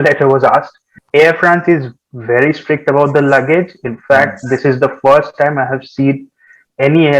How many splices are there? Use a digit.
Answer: 1